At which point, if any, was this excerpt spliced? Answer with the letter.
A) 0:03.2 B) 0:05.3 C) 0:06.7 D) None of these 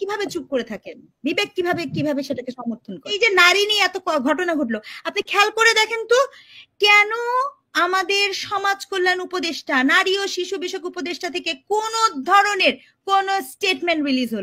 A